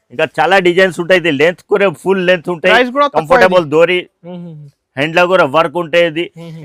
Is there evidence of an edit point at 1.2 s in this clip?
no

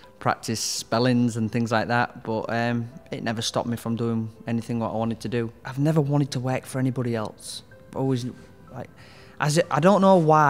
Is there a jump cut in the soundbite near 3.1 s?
no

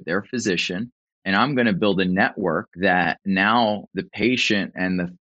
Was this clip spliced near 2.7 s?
yes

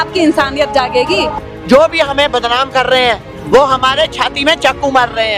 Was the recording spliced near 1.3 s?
yes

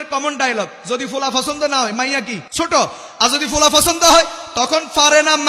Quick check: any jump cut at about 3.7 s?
no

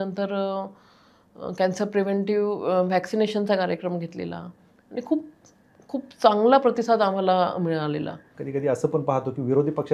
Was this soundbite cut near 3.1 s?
no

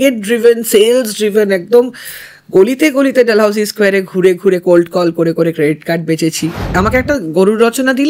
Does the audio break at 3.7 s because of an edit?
no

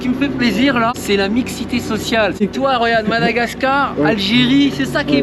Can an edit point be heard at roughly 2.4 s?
yes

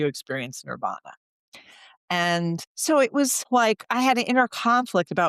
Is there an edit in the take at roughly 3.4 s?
yes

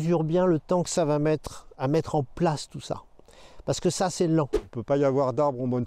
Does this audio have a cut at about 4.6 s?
yes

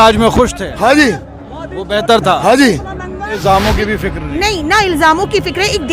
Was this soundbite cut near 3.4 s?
yes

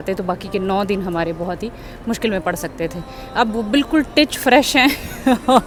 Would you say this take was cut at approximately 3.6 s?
no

